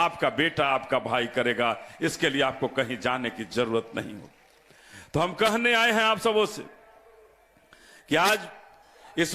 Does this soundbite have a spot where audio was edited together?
no; 0 cuts

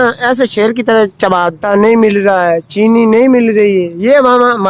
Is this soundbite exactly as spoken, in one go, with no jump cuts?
no; 1 cut; at 1.6 s

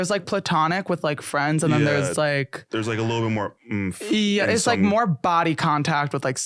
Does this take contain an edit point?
no; 0 cuts

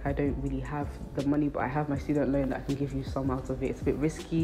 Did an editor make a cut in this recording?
yes; 1 cut; at 1.7 s

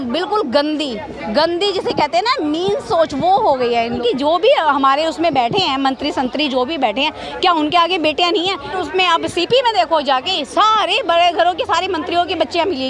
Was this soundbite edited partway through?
yes; 2 cuts; at 4.0 s, 8.7 s

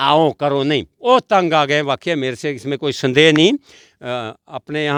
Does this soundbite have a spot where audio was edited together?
no; 0 cuts

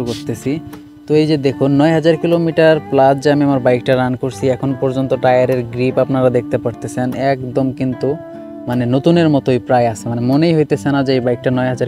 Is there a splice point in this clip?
no; 0 cuts

